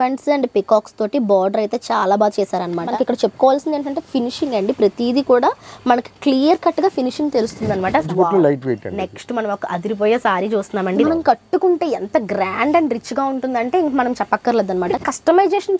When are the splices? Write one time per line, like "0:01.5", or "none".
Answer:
0:02.9
0:08.1
0:11.0
0:15.0